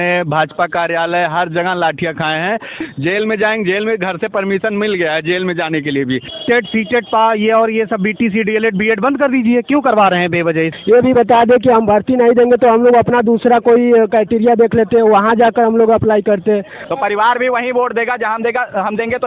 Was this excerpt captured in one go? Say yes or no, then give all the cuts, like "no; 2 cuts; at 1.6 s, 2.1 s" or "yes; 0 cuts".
no; 4 cuts; at 2.8 s, 6.3 s, 10.7 s, 16.8 s